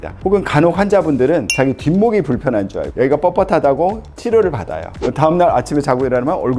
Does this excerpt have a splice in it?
yes; 1 cut; at 2.9 s

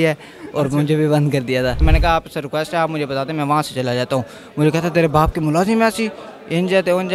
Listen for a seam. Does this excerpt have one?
yes; 1 cut; at 1.8 s

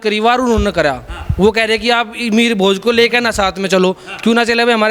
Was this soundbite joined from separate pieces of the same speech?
no; 0 cuts

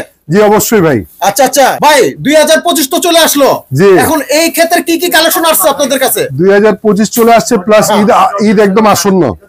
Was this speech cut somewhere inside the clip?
no; 0 cuts

